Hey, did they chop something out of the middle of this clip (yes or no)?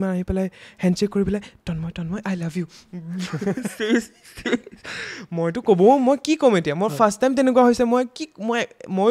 no